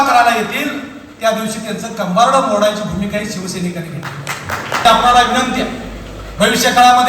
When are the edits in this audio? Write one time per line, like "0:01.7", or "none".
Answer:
0:04.9